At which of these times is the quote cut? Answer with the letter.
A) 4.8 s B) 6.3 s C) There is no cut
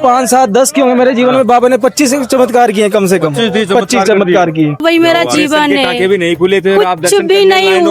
A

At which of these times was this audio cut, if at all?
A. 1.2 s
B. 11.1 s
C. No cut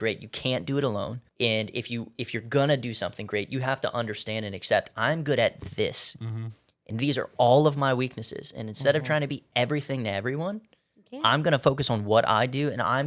A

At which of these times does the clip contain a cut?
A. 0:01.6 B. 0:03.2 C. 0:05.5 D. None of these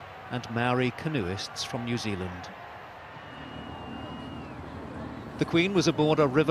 B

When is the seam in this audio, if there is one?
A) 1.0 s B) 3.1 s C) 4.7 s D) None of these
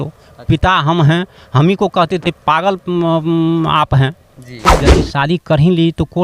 C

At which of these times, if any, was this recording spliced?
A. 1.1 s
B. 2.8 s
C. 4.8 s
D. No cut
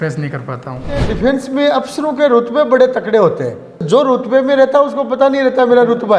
A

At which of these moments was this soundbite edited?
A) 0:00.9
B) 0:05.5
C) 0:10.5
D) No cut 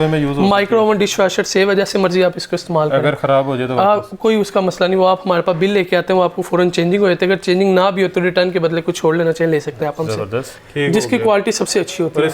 C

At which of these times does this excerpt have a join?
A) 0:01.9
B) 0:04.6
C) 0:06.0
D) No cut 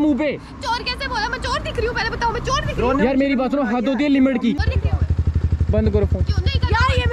B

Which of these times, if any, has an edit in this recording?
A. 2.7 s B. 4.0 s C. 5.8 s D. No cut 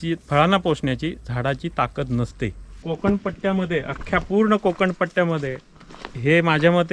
A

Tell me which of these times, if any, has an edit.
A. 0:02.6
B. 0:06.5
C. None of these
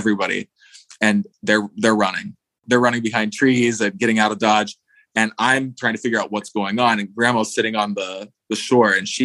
A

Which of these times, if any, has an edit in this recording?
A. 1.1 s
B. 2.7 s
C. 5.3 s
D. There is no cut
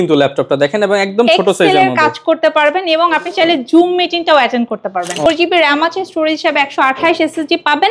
C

